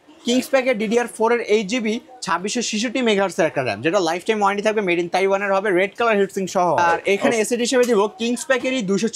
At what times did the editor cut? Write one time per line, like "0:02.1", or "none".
0:06.8